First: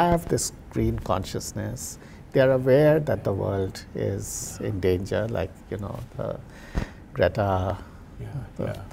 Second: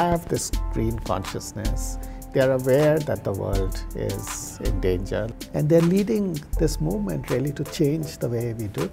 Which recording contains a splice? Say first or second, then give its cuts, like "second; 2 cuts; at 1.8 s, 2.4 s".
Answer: second; 1 cut; at 5.3 s